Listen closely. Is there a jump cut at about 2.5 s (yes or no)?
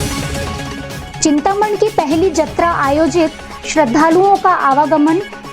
no